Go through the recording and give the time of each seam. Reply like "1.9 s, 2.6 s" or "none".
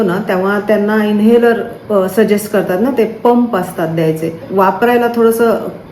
4.4 s